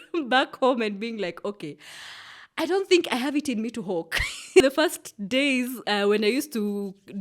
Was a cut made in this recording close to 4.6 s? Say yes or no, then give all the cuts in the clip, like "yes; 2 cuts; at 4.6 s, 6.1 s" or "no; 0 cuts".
yes; 1 cut; at 4.6 s